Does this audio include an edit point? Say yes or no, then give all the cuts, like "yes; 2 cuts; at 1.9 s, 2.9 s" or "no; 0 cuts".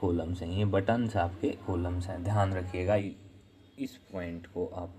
yes; 1 cut; at 3.0 s